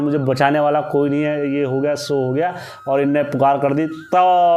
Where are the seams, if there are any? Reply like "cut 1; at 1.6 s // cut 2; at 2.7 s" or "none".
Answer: none